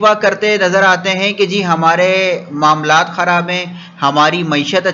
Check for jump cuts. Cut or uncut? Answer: uncut